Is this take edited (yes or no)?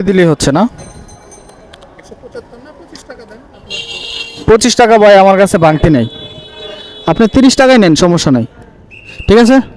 no